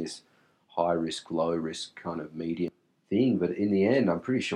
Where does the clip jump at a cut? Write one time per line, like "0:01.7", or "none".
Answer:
0:02.7

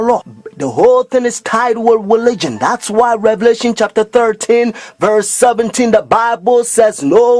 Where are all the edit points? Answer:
none

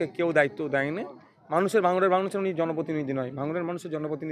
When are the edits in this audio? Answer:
none

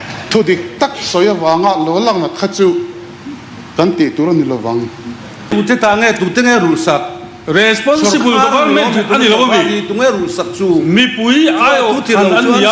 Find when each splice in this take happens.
0:05.5

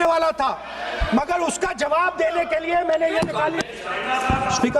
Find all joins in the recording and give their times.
0:03.7

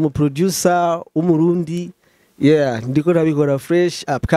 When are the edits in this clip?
none

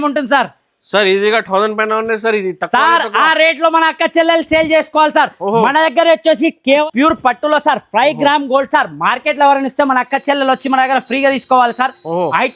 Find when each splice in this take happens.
0:06.8

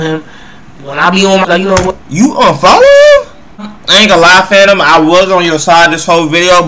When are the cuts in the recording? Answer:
0:01.4
0:03.8

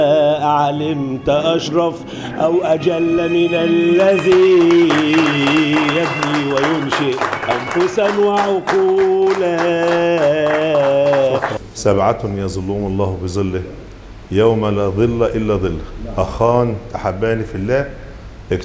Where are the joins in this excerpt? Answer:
0:11.5

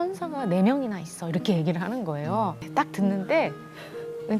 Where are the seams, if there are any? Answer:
0:02.6

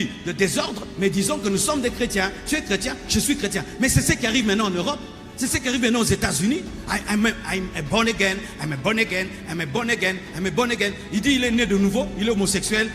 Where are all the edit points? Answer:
none

